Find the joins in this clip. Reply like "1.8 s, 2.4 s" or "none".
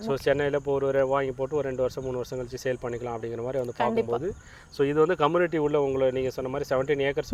none